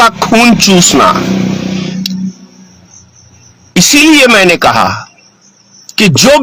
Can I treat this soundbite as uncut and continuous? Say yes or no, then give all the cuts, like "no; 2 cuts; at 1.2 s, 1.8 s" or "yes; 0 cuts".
yes; 0 cuts